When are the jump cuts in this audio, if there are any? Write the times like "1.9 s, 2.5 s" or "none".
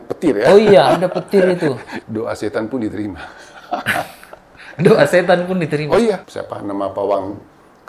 1.9 s, 6.2 s

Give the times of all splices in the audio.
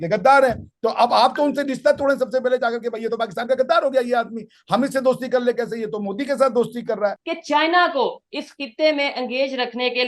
7.3 s

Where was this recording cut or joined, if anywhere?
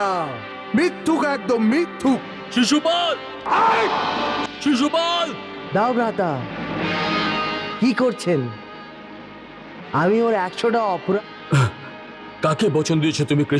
11.2 s

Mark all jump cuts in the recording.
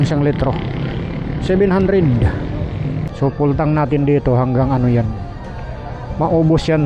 3.1 s

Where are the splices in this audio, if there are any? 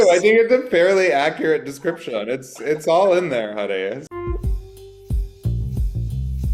4.0 s

